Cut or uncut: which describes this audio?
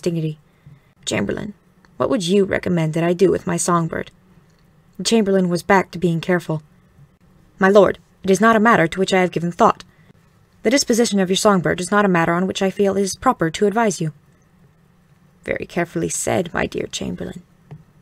uncut